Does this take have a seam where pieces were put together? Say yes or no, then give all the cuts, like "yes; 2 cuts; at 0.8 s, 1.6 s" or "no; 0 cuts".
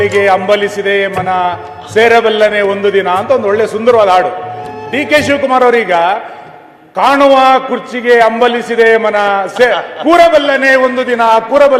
no; 0 cuts